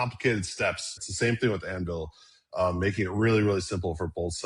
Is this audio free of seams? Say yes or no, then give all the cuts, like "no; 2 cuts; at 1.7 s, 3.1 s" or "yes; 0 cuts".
no; 1 cut; at 1.0 s